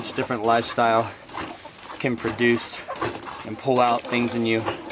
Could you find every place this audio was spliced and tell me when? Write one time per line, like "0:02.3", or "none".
none